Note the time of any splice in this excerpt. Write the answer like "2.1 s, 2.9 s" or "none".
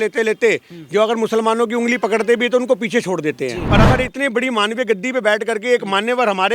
3.6 s